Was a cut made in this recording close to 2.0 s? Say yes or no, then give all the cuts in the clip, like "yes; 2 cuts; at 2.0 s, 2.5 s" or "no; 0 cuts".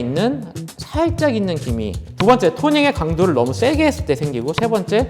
yes; 1 cut; at 2.0 s